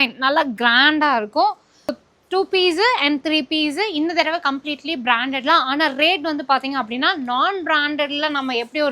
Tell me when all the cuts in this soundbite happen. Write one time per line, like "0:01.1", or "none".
0:01.9